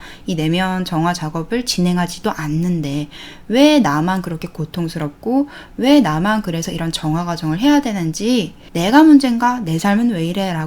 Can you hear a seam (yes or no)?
yes